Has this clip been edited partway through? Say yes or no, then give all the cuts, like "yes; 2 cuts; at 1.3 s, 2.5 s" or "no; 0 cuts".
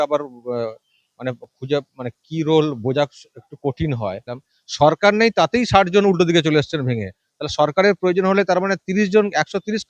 yes; 1 cut; at 4.5 s